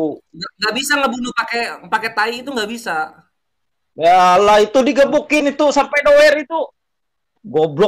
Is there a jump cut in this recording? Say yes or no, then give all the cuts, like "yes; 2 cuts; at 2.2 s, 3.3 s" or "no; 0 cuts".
no; 0 cuts